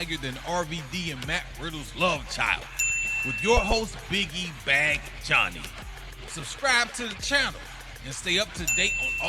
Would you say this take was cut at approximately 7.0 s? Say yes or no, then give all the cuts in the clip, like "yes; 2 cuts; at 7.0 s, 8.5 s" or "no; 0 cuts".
no; 0 cuts